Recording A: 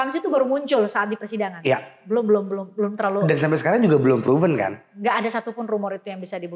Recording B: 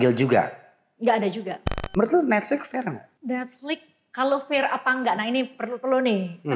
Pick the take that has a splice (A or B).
B